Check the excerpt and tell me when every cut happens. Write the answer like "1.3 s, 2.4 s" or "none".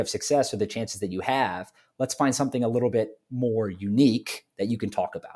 none